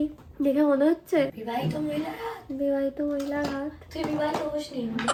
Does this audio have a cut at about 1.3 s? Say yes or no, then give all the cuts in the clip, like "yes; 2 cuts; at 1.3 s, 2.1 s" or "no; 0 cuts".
no; 0 cuts